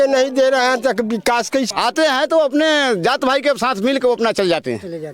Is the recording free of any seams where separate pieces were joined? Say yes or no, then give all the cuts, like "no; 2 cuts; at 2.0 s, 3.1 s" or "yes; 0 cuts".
no; 1 cut; at 1.7 s